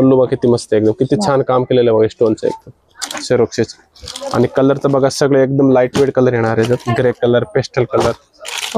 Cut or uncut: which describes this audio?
uncut